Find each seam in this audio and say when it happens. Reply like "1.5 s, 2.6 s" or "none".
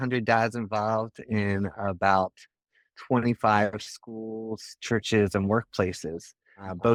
none